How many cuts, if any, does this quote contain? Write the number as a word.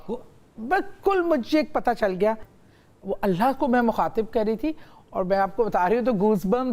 one